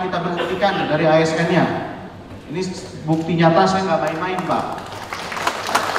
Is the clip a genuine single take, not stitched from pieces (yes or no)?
yes